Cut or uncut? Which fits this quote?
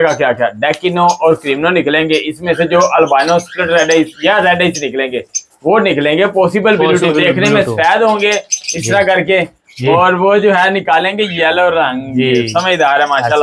uncut